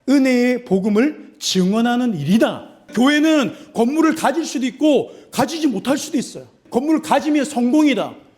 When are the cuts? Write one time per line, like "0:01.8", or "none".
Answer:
0:02.9
0:06.6